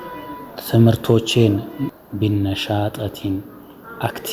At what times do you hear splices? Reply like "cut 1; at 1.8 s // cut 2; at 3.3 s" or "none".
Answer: cut 1; at 2.0 s